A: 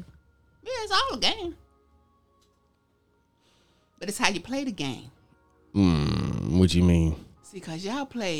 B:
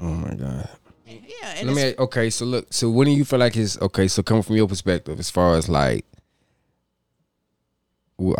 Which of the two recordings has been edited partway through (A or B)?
B